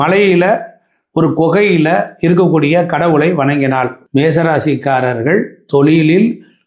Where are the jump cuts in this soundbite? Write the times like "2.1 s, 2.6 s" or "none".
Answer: 4.0 s